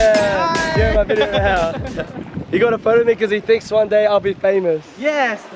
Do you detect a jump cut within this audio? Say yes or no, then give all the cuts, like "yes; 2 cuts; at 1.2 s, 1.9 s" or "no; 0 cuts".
no; 0 cuts